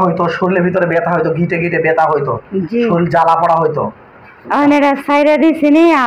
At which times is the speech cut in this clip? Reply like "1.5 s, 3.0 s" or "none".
none